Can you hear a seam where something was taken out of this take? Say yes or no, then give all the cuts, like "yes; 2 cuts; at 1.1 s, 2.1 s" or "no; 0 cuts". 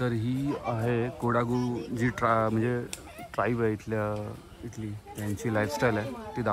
no; 0 cuts